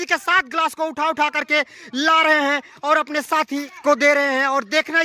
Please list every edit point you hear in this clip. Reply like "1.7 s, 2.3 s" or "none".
3.7 s